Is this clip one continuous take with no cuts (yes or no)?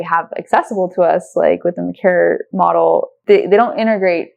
no